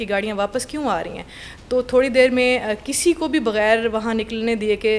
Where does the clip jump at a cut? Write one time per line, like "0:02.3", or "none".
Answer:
none